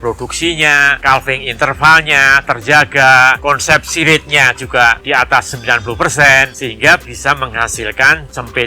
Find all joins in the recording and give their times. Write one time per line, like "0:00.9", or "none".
0:00.9
0:03.4
0:06.5